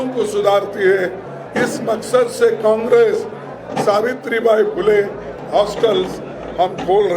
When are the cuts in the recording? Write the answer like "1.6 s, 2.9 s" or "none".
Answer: 5.4 s